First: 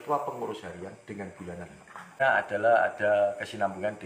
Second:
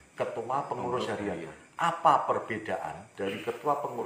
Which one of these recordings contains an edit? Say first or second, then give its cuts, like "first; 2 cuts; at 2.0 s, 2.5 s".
first; 1 cut; at 2.2 s